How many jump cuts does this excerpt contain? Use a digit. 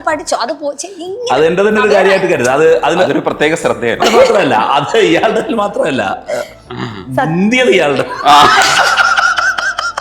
1